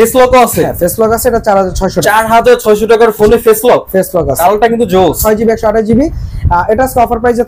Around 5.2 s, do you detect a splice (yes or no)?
yes